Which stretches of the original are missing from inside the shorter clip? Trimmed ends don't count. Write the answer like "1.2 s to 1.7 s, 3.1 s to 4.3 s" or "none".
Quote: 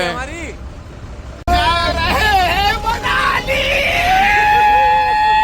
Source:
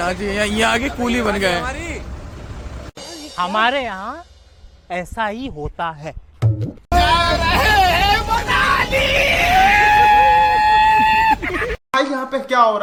2.8 s to 6.7 s